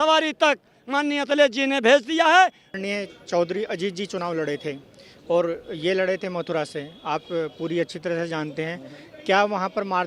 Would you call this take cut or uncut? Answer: cut